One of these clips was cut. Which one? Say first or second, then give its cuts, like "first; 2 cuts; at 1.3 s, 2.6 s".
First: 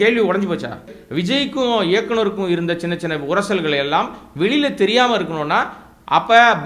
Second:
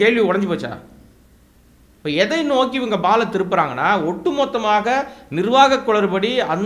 first; 1 cut; at 1.0 s